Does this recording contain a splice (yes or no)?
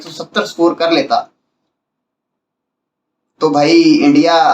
no